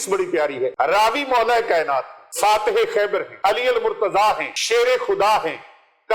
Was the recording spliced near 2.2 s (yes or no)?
yes